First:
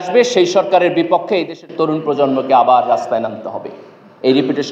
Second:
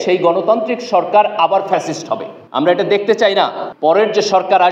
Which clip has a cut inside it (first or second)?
second